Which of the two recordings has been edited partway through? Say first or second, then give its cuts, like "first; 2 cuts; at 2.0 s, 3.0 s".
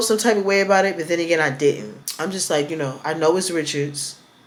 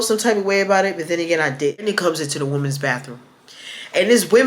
second; 1 cut; at 1.8 s